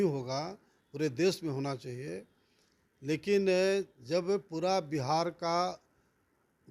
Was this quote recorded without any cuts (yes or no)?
yes